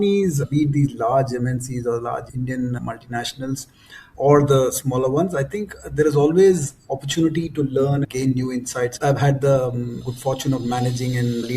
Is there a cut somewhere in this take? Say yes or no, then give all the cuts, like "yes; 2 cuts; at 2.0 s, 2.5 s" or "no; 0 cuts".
yes; 2 cuts; at 8.0 s, 9.0 s